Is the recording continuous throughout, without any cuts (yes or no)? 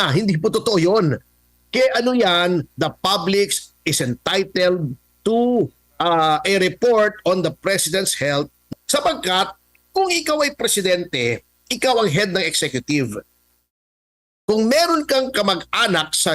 no